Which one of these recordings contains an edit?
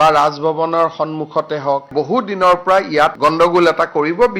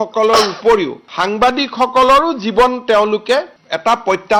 first; 2 cuts; at 1.9 s, 3.1 s

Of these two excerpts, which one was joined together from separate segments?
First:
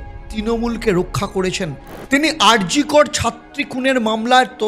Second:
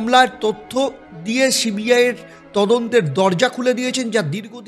first; 1 cut; at 1.9 s

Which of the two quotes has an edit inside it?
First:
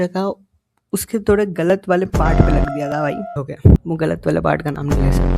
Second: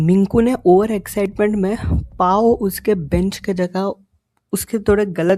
first; 1 cut; at 3.4 s

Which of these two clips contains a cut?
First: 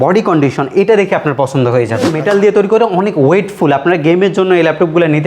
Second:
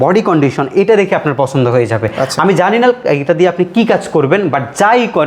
first; 1 cut; at 2.1 s

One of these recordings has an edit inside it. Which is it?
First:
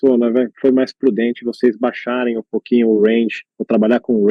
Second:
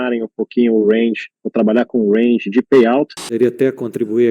second; 1 cut; at 3.2 s

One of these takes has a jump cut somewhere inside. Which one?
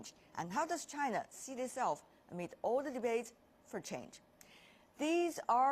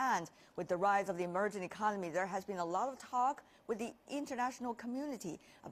first; 1 cut; at 3.4 s

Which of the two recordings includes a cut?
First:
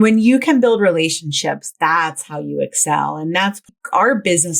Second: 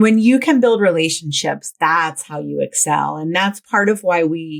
first; 1 cut; at 3.7 s

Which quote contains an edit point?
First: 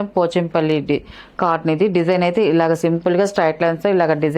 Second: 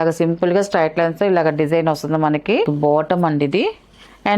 second; 1 cut; at 2.7 s

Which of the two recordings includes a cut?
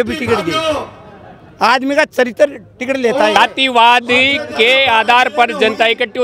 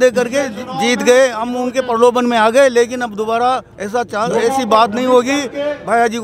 first; 1 cut; at 3.4 s

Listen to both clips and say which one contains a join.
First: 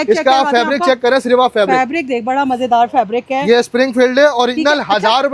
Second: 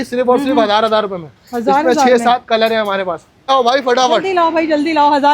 second; 1 cut; at 3.5 s

